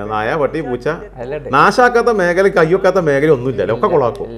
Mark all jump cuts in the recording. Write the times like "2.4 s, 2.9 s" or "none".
none